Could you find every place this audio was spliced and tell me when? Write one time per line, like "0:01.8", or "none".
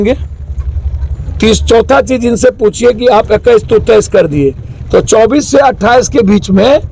none